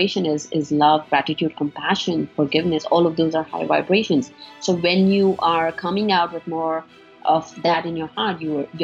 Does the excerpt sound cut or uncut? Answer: uncut